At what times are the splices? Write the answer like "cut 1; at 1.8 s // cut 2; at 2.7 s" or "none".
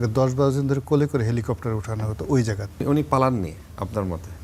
cut 1; at 2.8 s